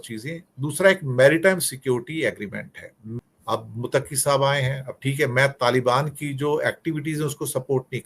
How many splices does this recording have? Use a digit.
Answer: 1